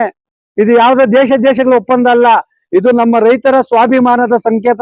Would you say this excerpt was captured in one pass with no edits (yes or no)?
yes